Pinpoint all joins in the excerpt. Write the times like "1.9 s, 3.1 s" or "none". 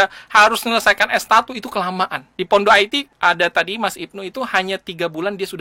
2.2 s, 3.1 s